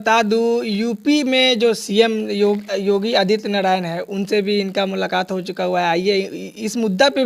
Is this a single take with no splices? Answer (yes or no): yes